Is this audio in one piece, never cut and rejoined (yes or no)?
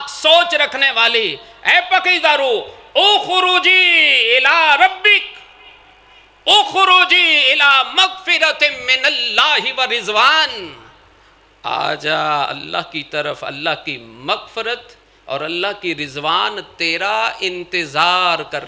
yes